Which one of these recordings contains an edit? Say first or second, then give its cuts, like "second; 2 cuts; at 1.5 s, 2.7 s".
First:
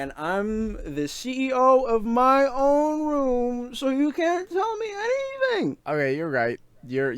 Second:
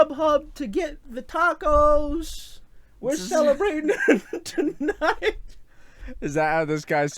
first; 1 cut; at 5.8 s